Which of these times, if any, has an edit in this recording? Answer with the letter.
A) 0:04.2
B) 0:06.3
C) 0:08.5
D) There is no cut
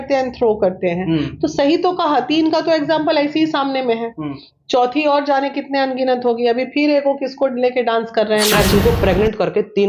C